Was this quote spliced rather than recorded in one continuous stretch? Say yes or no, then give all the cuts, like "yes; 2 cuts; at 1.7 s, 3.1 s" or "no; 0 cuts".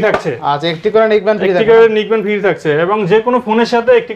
no; 0 cuts